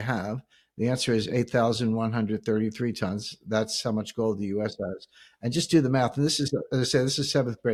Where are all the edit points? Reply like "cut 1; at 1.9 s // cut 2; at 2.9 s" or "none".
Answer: none